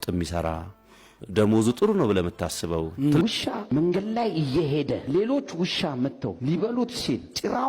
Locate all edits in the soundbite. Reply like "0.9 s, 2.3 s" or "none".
3.2 s